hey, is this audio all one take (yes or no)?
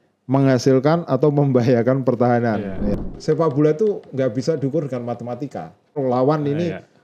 no